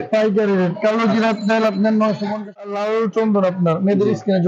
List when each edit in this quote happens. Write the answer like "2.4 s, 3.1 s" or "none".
2.7 s